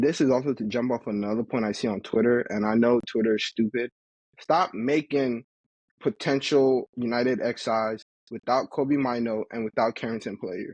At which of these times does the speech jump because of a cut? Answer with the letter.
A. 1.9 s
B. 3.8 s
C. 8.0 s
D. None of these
D